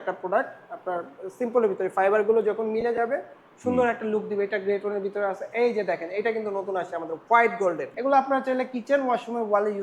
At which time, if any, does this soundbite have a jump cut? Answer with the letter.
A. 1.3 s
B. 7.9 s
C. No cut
B